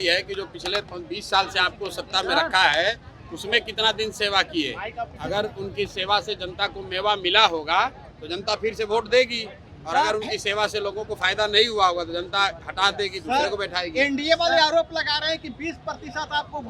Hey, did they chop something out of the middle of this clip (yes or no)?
no